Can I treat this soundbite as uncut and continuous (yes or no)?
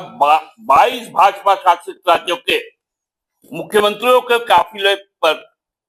yes